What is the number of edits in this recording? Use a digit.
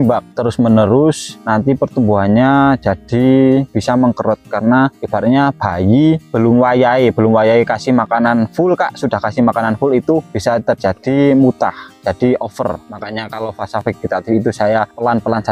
0